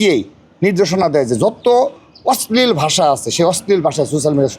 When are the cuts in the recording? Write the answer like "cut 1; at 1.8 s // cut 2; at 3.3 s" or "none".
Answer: none